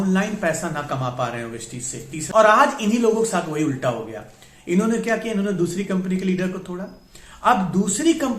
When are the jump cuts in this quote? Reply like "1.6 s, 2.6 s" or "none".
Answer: 2.3 s